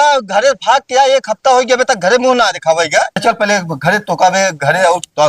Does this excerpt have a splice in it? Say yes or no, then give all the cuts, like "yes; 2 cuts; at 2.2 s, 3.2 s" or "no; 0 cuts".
yes; 1 cut; at 3.2 s